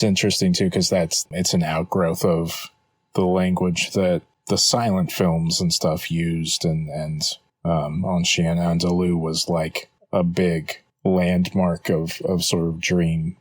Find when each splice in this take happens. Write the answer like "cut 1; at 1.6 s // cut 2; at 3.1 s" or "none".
cut 1; at 1.2 s